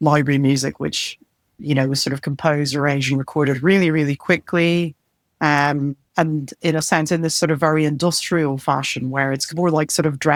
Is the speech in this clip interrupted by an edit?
no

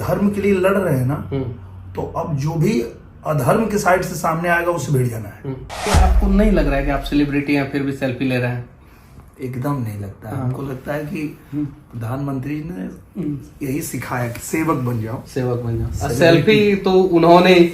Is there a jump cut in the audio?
yes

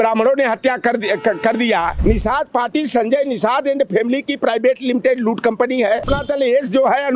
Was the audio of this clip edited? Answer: yes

